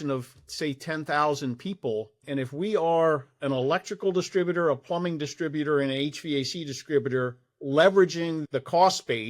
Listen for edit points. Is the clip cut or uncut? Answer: cut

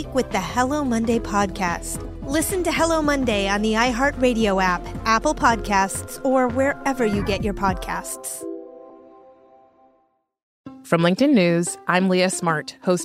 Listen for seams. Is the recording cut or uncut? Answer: cut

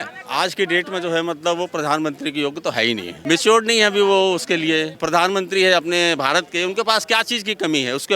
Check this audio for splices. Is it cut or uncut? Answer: cut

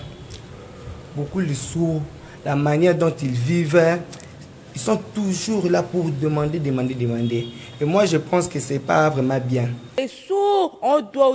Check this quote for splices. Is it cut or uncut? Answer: cut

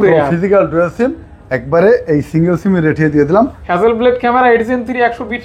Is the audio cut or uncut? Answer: cut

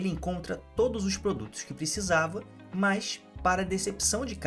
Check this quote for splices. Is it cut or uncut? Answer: uncut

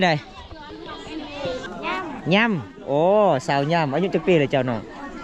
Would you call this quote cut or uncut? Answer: cut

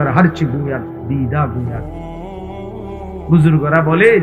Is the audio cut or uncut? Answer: cut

